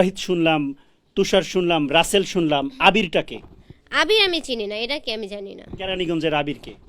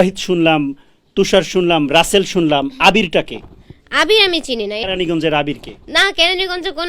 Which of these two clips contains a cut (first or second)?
second